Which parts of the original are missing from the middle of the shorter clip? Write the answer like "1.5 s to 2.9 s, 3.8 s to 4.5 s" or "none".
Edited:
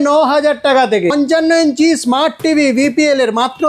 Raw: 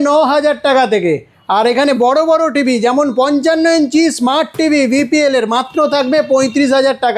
1.1 s to 3.3 s